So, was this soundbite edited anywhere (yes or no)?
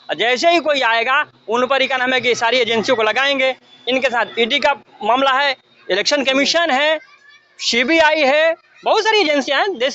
no